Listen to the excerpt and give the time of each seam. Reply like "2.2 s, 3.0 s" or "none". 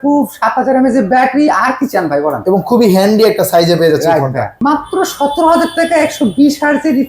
4.6 s

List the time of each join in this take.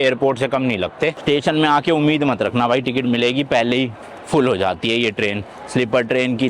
1.2 s

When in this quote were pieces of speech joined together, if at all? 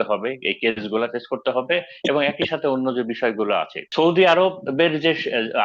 3.8 s

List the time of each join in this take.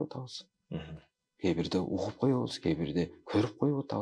none

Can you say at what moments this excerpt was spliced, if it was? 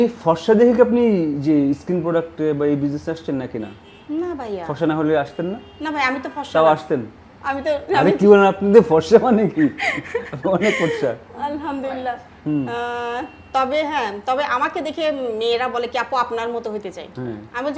none

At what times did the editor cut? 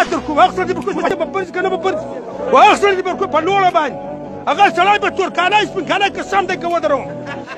1.1 s

